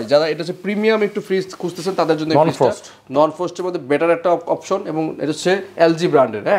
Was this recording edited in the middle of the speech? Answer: no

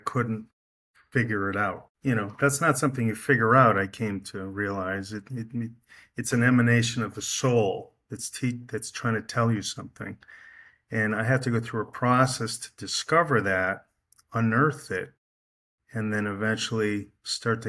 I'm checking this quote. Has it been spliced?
no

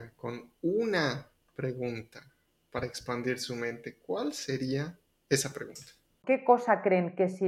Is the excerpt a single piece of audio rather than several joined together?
no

